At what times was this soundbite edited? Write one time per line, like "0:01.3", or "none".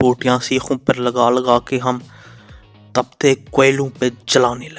none